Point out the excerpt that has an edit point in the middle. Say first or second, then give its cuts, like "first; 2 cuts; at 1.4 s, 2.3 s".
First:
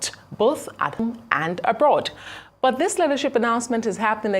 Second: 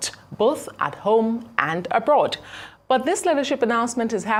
first; 1 cut; at 1.0 s